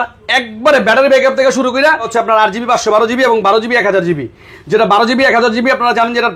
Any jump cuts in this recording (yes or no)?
yes